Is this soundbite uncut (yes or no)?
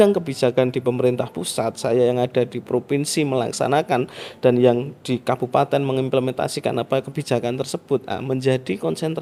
yes